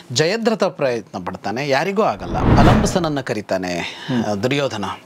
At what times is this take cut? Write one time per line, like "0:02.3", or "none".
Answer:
0:02.4